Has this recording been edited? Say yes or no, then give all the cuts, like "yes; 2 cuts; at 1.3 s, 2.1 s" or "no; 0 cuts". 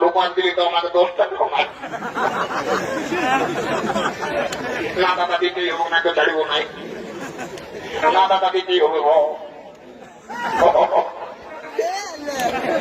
no; 0 cuts